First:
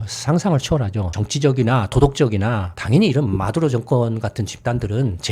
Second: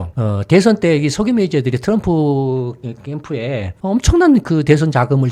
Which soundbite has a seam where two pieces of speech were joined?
first; 2 cuts; at 1.1 s, 2.7 s

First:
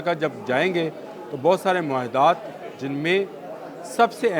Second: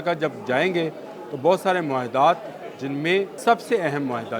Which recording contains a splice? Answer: second; 1 cut; at 3.3 s

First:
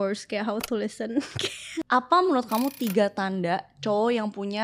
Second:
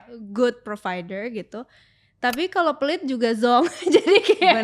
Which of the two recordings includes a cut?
first; 1 cut; at 1.9 s

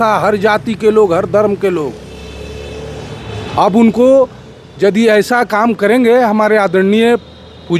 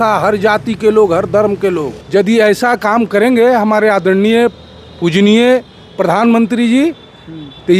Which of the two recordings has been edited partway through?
second; 1 cut; at 2.0 s

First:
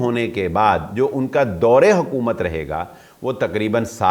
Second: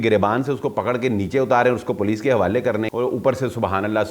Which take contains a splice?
second; 1 cut; at 2.9 s

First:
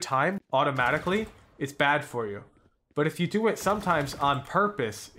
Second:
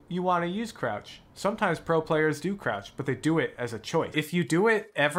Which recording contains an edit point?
second; 1 cut; at 4.1 s

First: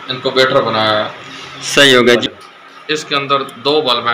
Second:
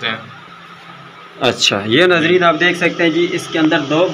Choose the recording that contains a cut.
first; 1 cut; at 2.2 s

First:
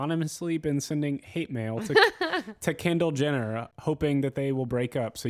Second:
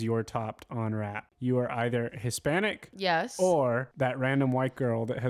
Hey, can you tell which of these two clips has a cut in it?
second; 3 cuts; at 1.2 s, 2.9 s, 3.9 s

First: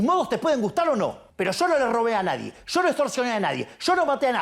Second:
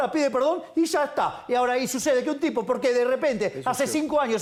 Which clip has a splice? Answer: first; 1 cut; at 1.2 s

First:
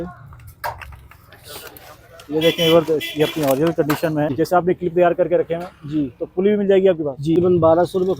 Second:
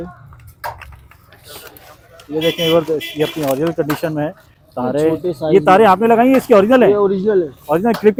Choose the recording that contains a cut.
first; 2 cuts; at 4.3 s, 7.4 s

